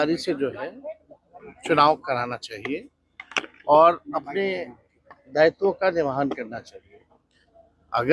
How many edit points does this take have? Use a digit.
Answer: 0